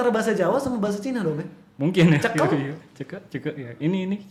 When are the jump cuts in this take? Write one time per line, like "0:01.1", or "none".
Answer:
none